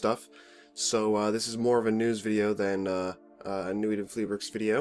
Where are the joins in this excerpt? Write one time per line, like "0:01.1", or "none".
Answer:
0:02.0

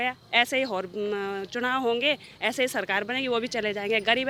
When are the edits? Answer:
none

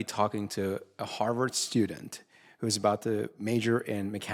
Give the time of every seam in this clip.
none

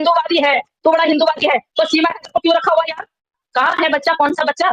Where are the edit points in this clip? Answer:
0:03.5

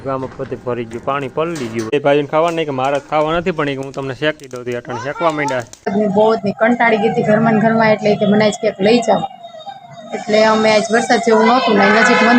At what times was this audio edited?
0:01.9
0:05.9

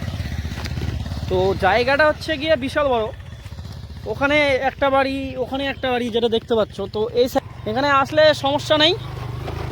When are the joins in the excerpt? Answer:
0:07.4

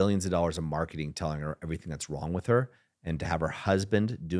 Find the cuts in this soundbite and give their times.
none

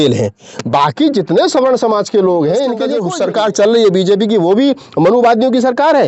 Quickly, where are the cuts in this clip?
0:03.0

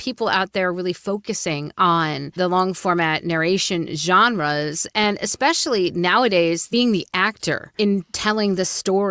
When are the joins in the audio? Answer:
0:02.3
0:06.7
0:07.7

